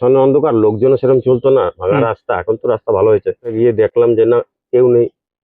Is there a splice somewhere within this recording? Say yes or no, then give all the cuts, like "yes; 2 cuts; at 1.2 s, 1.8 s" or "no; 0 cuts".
yes; 1 cut; at 3.5 s